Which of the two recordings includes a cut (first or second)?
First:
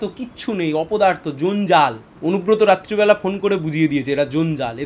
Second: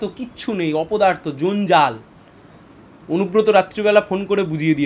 first